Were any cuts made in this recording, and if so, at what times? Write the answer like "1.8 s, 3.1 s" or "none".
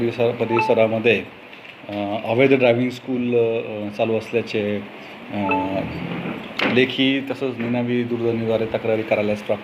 none